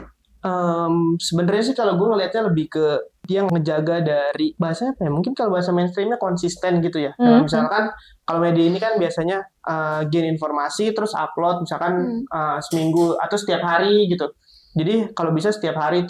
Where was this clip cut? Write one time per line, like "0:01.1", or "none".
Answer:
0:03.3
0:04.5